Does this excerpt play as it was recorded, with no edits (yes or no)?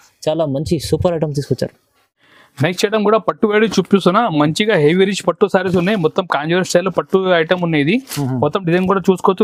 yes